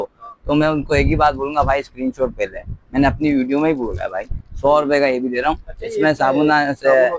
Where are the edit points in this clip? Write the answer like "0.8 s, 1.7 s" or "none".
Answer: none

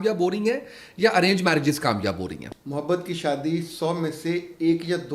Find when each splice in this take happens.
2.5 s

